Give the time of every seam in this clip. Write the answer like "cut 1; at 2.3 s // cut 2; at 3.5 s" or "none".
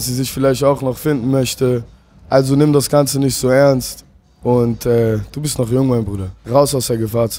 cut 1; at 6.4 s